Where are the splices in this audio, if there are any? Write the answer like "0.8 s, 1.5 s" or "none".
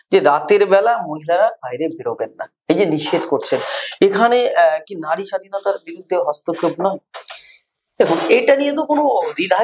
none